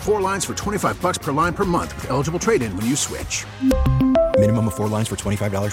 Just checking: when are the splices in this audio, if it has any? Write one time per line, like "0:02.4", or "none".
none